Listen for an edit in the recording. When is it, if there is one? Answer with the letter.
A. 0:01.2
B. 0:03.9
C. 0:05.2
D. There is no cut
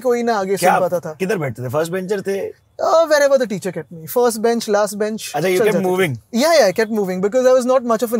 C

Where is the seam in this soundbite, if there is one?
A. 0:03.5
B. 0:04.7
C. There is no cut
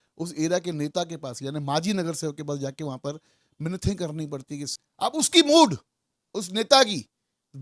B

